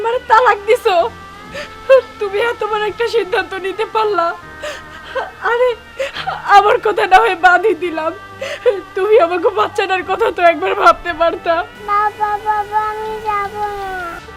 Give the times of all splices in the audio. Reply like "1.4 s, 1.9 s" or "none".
11.7 s